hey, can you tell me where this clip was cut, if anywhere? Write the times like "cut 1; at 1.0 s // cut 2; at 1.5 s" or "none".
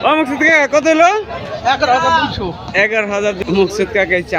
cut 1; at 3.4 s